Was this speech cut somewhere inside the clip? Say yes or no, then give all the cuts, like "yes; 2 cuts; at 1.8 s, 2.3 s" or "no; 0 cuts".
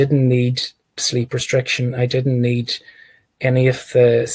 no; 0 cuts